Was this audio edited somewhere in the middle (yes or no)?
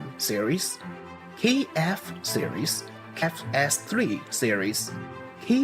yes